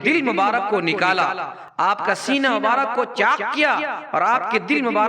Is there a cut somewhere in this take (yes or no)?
no